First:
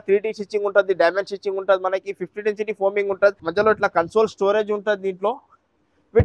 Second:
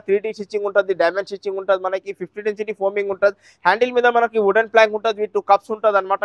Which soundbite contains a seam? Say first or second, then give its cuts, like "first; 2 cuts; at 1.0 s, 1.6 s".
first; 1 cut; at 3.4 s